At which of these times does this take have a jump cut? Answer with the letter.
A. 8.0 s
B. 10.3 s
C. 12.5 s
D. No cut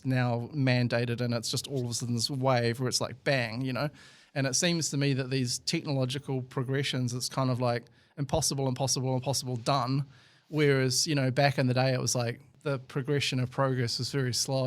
C